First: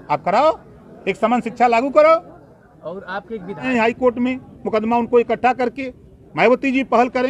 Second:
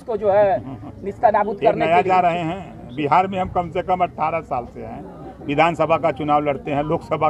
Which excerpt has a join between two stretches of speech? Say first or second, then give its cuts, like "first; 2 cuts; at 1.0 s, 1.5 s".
first; 1 cut; at 3.7 s